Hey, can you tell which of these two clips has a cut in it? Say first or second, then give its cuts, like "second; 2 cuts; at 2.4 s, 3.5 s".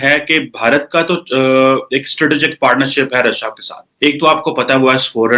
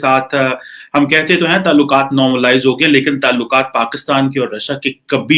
first; 1 cut; at 3.8 s